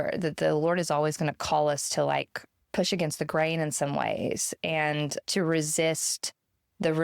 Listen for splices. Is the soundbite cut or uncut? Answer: cut